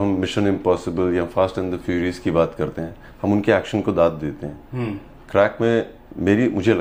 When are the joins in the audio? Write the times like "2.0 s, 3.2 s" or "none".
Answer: none